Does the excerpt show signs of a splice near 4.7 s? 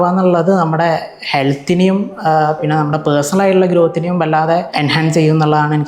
yes; 1 cut; at 4.7 s

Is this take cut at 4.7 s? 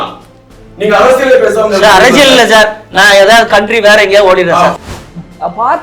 yes; 1 cut; at 4.7 s

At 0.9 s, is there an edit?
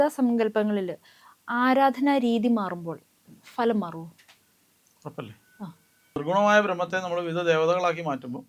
no; 1 cut; at 6.2 s

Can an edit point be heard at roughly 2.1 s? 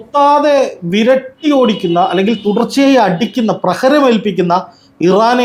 no; 0 cuts

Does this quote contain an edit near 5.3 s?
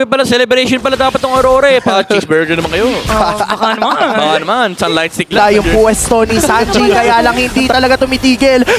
yes; 1 cut; at 5.3 s

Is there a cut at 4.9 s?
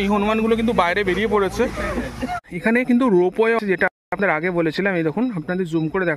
no; 1 cut; at 2.4 s

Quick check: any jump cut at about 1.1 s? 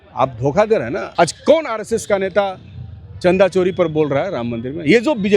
yes; 1 cut; at 1.1 s

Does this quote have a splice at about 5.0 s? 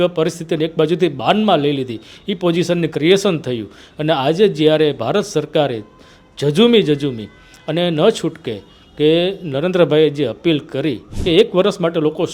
no; 1 cut; at 11.1 s

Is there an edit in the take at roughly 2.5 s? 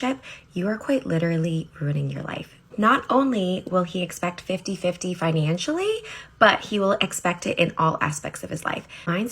yes; 1 cut; at 2.5 s

